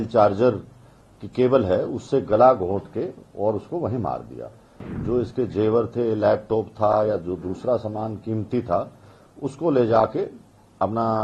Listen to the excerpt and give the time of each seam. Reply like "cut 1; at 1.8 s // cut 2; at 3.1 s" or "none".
cut 1; at 4.9 s